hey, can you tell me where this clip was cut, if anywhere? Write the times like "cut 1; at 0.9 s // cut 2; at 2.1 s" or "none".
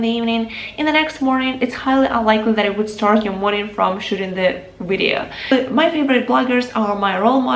cut 1; at 5.4 s